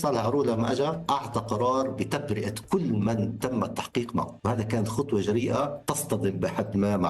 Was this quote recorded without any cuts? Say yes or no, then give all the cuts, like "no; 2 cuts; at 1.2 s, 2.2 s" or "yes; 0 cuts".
no; 3 cuts; at 1.0 s, 4.3 s, 5.9 s